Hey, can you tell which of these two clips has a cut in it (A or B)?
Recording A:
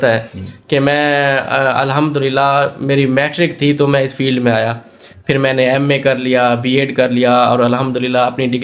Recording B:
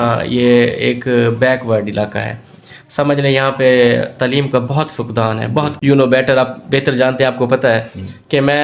B